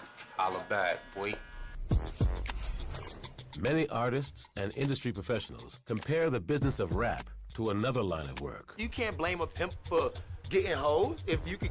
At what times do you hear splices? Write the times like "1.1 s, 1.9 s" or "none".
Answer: none